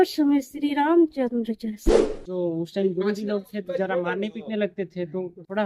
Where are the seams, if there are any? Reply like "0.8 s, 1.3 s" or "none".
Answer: 2.2 s